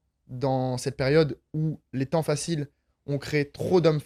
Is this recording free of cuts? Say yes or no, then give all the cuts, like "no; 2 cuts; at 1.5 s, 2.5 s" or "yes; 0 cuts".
yes; 0 cuts